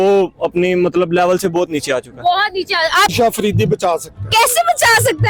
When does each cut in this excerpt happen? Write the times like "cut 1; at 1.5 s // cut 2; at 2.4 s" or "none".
cut 1; at 3.1 s